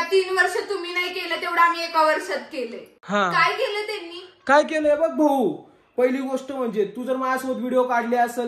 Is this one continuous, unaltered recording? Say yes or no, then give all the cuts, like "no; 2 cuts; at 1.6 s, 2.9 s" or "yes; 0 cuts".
yes; 0 cuts